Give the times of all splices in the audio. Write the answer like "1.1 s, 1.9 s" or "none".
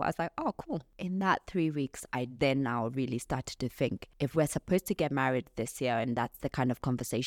0.9 s, 4.0 s